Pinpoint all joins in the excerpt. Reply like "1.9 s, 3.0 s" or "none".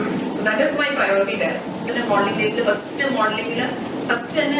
1.9 s

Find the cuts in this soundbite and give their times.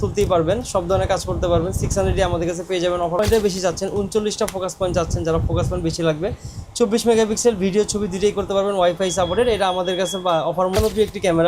3.2 s, 10.8 s

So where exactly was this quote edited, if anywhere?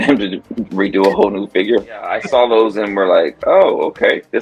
2.2 s

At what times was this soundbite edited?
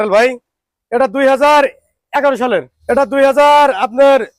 2.7 s

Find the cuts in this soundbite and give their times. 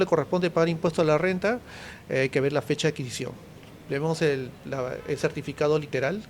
none

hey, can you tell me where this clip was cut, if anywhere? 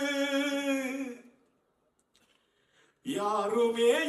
none

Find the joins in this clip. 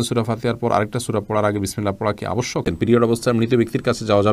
2.6 s

